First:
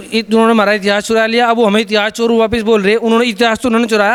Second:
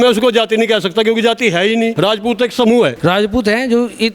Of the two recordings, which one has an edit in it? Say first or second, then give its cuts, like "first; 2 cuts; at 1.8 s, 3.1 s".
second; 2 cuts; at 1.9 s, 3.0 s